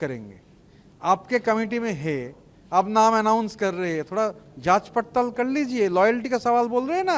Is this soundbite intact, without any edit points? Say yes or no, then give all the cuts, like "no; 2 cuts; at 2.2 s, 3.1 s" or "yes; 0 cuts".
yes; 0 cuts